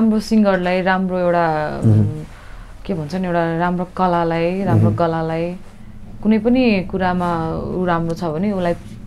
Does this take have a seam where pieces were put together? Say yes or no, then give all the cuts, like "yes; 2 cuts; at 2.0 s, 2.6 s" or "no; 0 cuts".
no; 0 cuts